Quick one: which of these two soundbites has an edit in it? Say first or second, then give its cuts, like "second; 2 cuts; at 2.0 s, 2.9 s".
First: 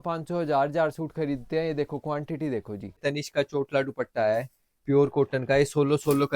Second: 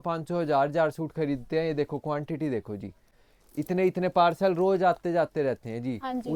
first; 1 cut; at 3.0 s